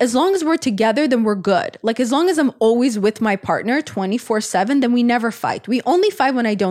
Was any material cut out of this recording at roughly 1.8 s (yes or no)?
no